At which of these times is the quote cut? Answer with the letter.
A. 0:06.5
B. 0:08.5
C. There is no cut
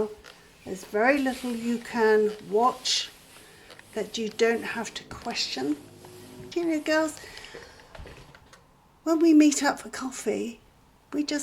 A